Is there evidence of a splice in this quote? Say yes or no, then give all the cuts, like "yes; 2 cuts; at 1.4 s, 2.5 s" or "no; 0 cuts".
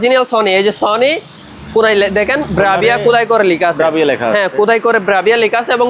no; 0 cuts